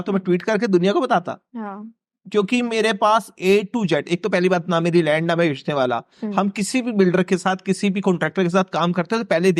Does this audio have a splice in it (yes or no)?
no